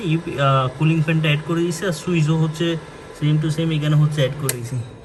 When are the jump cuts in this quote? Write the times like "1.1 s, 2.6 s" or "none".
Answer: none